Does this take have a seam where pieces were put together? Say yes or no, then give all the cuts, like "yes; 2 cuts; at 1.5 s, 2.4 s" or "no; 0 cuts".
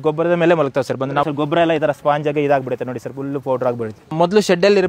yes; 2 cuts; at 1.2 s, 4.1 s